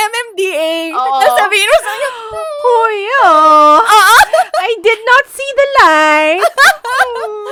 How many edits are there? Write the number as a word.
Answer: zero